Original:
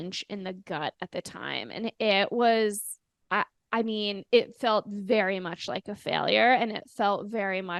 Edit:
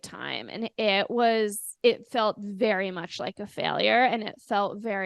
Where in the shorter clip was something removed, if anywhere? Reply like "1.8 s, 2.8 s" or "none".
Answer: 1.7 s